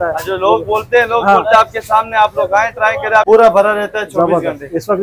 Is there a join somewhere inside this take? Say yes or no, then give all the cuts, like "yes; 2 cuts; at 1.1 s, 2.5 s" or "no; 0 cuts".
yes; 1 cut; at 3.2 s